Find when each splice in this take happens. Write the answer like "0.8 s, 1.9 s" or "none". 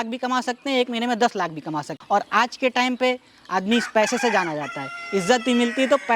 2.0 s